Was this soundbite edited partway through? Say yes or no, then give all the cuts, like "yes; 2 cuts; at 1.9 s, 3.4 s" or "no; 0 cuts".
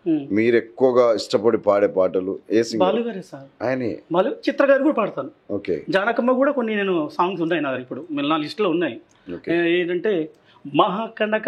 no; 0 cuts